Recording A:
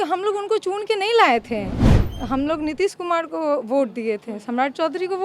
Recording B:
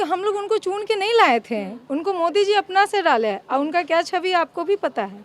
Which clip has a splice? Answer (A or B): A